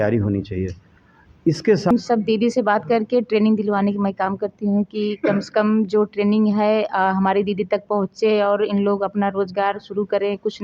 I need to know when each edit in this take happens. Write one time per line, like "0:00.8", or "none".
0:01.9